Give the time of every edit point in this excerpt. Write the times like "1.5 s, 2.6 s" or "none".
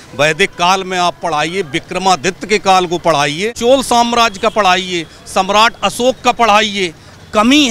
3.5 s